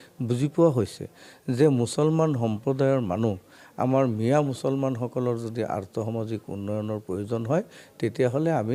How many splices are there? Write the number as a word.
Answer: zero